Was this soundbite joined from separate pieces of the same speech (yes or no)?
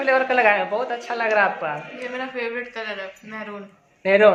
no